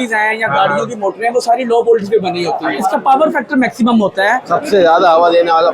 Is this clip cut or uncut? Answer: cut